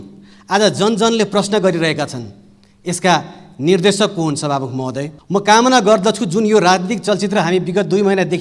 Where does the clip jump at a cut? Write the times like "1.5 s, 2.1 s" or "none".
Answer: 5.1 s

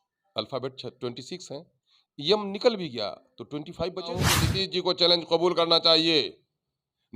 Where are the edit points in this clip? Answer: 4.4 s

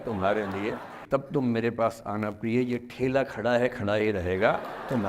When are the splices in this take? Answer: 1.0 s

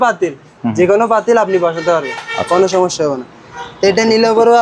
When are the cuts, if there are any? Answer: none

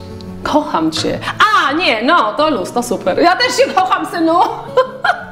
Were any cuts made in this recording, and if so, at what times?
none

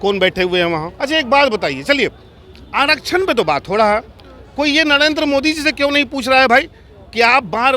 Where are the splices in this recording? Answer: 0.9 s

